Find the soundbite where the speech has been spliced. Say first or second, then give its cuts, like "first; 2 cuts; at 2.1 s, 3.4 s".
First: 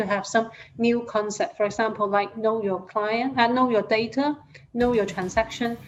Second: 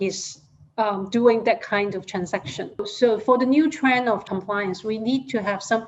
second; 2 cuts; at 2.9 s, 4.2 s